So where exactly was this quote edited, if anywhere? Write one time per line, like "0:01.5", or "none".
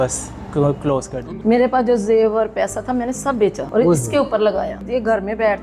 0:01.2
0:03.6
0:04.8